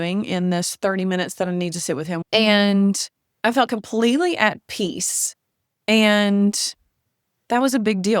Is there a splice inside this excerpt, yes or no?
yes